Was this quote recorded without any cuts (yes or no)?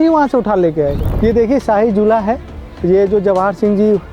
no